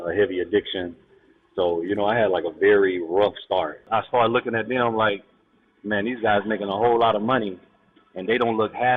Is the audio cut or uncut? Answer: cut